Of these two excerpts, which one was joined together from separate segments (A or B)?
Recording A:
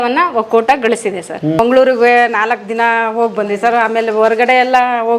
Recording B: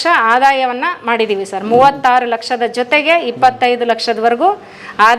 A